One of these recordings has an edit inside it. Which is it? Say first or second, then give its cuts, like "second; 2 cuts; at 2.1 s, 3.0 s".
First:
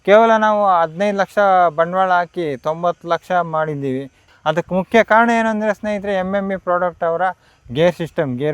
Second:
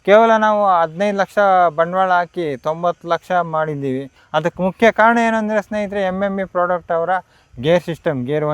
second; 1 cut; at 4.1 s